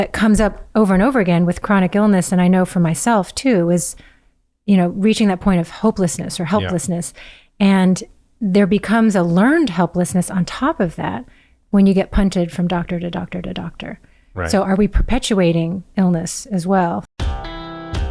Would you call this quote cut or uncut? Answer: cut